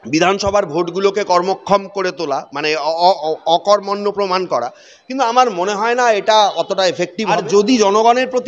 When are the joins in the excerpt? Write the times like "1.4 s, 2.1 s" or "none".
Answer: 7.4 s